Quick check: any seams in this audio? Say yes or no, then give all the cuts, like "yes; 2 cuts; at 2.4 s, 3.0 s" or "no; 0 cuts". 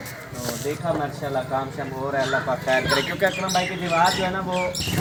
no; 0 cuts